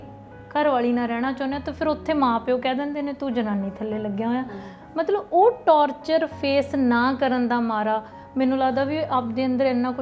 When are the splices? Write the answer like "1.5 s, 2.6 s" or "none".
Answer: none